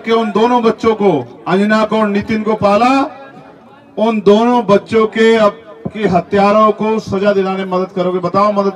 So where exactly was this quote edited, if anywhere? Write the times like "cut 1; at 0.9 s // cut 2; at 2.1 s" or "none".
none